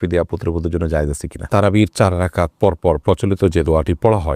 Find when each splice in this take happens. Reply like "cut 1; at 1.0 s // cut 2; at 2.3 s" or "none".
cut 1; at 1.4 s